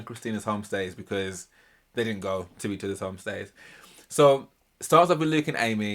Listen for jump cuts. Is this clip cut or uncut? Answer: uncut